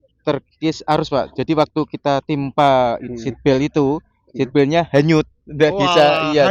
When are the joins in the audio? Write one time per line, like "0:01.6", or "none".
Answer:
none